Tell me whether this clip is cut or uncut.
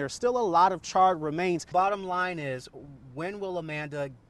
cut